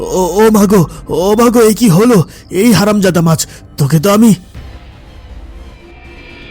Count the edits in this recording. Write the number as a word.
zero